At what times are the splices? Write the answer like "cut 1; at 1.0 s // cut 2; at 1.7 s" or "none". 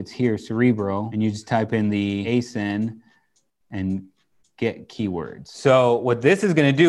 cut 1; at 1.1 s // cut 2; at 2.2 s // cut 3; at 5.4 s